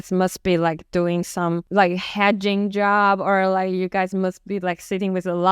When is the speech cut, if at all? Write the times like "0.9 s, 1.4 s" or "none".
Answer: 1.6 s

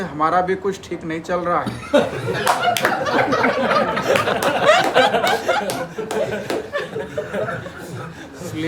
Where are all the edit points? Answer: none

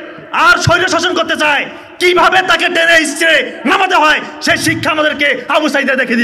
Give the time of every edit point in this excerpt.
none

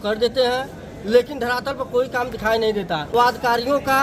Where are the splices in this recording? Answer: 3.1 s

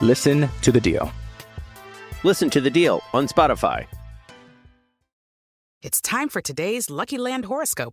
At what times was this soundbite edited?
5.6 s

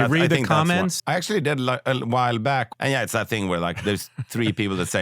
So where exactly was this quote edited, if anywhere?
0.9 s, 2.7 s

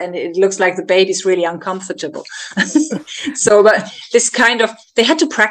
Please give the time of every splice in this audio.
none

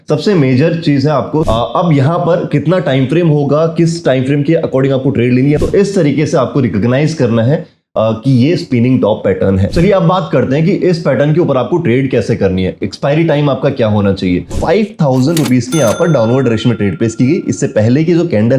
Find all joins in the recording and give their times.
1.5 s, 5.6 s, 9.7 s, 14.6 s

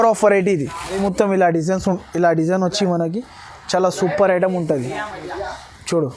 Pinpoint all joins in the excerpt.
1.0 s

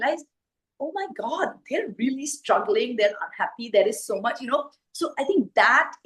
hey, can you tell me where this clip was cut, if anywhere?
none

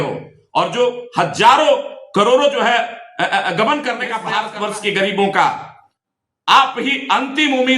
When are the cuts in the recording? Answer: 4.2 s

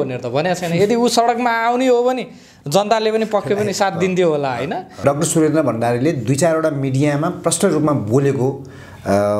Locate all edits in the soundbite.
5.0 s

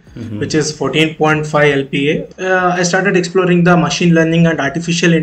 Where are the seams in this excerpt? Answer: 2.3 s

